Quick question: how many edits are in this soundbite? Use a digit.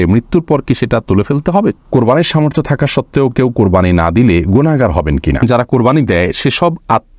2